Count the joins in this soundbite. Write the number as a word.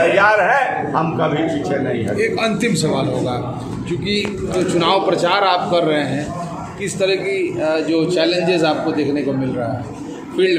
zero